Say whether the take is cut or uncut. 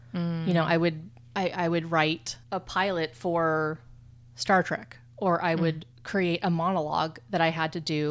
uncut